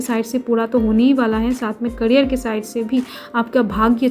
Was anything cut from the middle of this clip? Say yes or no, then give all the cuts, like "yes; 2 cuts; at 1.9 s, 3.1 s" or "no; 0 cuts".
no; 0 cuts